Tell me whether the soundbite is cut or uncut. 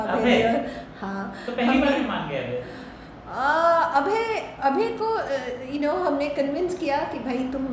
uncut